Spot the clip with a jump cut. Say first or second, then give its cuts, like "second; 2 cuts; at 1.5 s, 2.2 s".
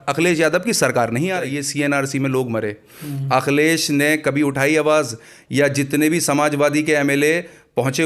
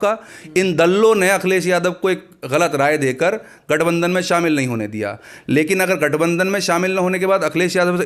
first; 1 cut; at 1.5 s